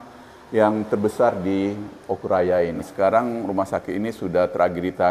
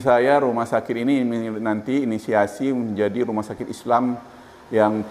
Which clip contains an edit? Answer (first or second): first